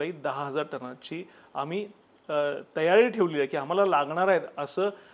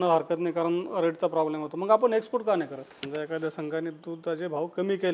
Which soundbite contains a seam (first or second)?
second